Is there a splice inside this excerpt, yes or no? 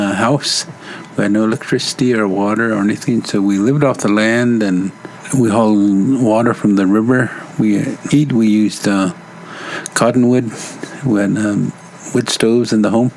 no